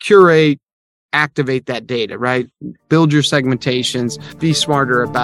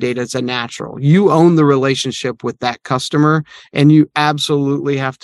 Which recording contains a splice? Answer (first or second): first